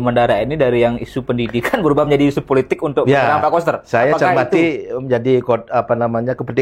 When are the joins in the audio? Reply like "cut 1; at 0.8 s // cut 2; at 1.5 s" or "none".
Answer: none